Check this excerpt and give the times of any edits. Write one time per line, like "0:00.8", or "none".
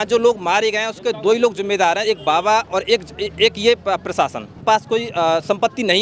0:04.6